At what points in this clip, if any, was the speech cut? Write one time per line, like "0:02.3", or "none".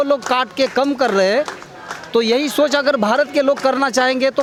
none